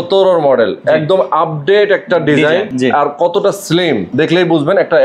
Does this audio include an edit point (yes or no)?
yes